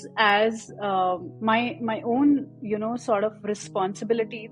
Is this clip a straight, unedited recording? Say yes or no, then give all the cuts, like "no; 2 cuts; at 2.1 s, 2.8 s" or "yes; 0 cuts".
no; 1 cut; at 1.3 s